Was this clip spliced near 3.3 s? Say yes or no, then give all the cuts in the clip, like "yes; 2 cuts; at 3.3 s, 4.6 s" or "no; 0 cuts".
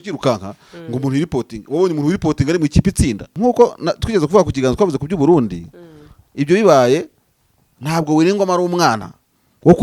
yes; 1 cut; at 3.3 s